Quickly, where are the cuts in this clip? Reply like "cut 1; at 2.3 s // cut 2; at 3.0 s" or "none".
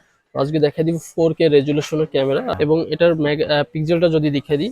cut 1; at 2.5 s